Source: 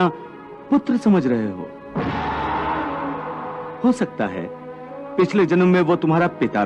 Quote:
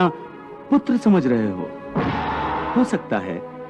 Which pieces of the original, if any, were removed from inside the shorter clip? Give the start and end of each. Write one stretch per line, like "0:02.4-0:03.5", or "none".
0:02.7-0:03.8

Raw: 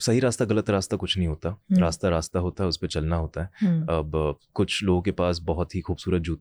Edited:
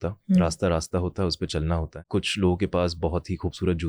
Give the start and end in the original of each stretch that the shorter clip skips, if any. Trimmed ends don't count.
0:03.4-0:04.4

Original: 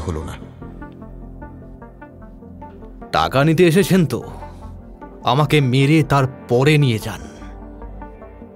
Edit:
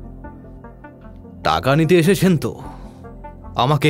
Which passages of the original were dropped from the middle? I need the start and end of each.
0:02.6-0:03.1

